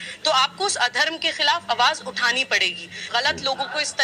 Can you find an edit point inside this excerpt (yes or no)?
yes